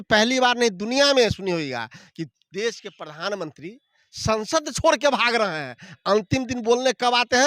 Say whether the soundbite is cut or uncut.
uncut